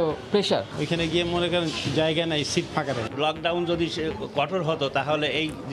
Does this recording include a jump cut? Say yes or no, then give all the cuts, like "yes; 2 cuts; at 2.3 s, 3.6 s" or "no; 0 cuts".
yes; 2 cuts; at 0.8 s, 3.1 s